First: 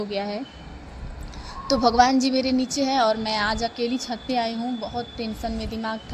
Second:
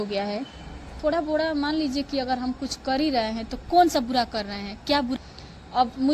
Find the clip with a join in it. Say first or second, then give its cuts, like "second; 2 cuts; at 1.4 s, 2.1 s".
second; 2 cuts; at 0.9 s, 5.2 s